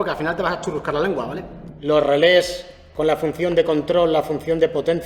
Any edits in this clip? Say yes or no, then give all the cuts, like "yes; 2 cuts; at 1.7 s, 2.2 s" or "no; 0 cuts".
yes; 1 cut; at 1.7 s